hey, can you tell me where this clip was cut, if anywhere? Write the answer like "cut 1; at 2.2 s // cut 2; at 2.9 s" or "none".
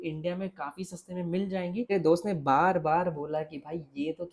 cut 1; at 1.9 s